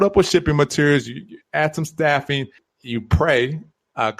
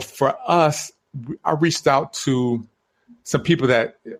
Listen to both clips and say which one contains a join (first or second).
first